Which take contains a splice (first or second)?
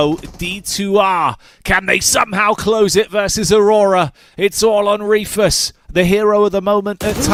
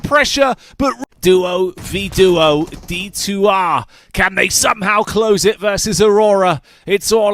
second